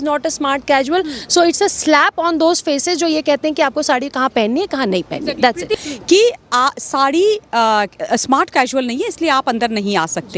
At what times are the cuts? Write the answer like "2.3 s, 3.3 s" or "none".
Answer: 5.7 s